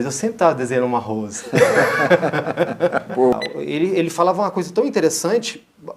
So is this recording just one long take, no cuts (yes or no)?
no